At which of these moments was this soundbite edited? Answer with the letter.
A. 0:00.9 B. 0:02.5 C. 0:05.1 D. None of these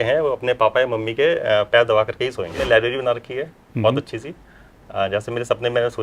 B